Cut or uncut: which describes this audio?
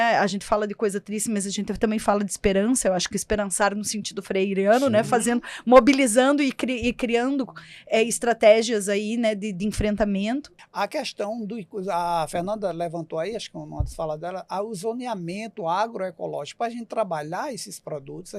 cut